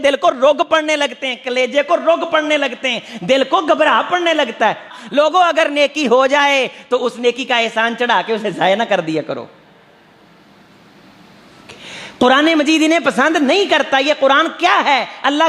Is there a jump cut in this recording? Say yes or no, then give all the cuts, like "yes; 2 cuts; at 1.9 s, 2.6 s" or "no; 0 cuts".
yes; 1 cut; at 4.9 s